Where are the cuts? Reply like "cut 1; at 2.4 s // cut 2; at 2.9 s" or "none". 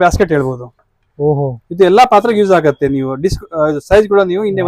none

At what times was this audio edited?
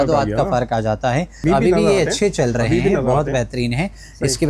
cut 1; at 1.4 s

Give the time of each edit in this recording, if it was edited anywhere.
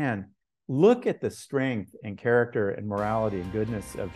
none

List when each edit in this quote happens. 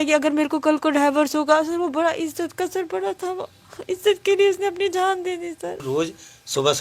cut 1; at 5.8 s

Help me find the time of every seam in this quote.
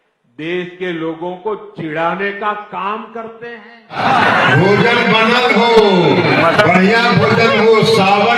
cut 1; at 3.9 s

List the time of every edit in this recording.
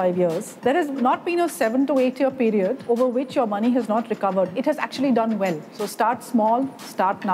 cut 1; at 1.0 s // cut 2; at 2.8 s // cut 3; at 4.5 s // cut 4; at 5.8 s

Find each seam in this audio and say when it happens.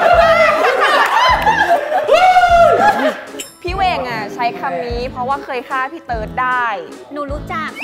cut 1; at 3.4 s // cut 2; at 6.9 s

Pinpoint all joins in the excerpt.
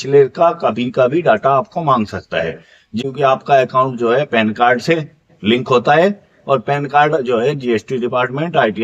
cut 1; at 3.0 s

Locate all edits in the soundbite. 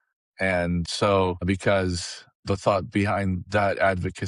cut 1; at 2.3 s

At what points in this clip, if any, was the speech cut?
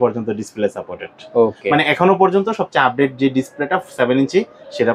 none

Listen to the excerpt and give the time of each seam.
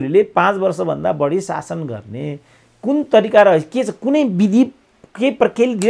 none

